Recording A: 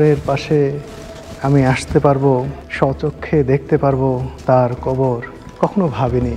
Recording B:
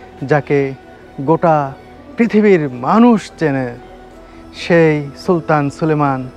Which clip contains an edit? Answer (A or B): A